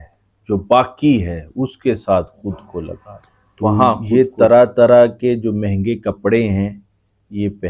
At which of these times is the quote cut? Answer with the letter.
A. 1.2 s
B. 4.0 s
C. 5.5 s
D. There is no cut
B